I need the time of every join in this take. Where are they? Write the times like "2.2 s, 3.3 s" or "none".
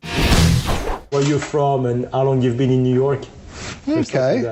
1.1 s